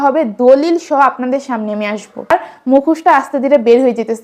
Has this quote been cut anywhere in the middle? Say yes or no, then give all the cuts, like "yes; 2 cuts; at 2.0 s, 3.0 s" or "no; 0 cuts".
yes; 1 cut; at 2.3 s